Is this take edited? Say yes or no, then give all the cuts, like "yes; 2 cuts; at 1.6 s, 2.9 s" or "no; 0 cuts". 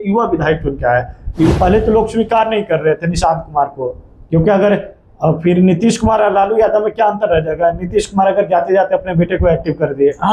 yes; 1 cut; at 1.5 s